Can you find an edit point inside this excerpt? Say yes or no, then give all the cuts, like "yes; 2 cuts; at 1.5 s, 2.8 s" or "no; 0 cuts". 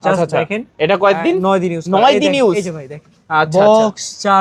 no; 0 cuts